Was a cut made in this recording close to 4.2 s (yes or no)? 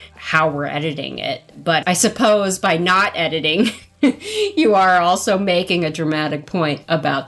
no